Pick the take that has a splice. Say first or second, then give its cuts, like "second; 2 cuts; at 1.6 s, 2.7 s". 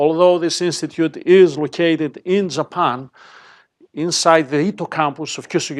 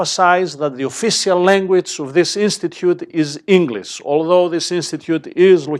second; 1 cut; at 1.4 s